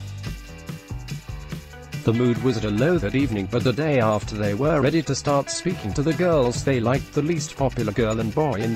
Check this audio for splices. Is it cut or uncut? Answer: cut